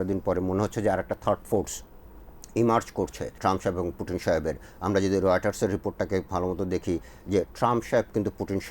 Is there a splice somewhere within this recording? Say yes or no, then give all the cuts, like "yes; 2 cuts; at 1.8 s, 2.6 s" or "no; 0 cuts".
yes; 1 cut; at 3.3 s